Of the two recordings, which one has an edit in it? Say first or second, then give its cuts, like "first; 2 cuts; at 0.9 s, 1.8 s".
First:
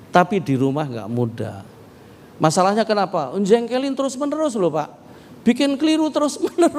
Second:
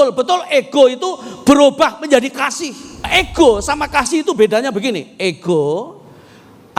second; 1 cut; at 3.1 s